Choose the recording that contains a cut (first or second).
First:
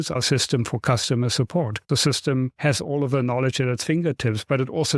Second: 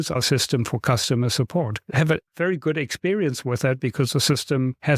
first